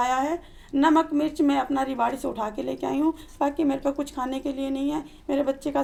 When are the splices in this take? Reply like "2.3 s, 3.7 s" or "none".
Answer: none